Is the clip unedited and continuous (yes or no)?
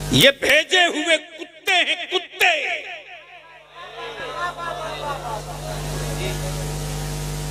yes